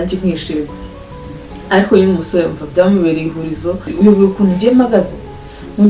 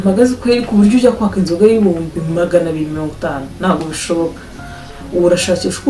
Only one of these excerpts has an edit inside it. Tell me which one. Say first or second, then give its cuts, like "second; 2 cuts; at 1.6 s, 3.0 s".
first; 1 cut; at 3.9 s